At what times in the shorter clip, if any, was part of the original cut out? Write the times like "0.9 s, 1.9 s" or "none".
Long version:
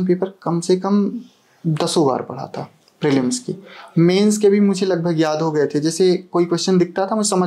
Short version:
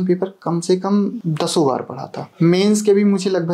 1.2 s, 2.2 s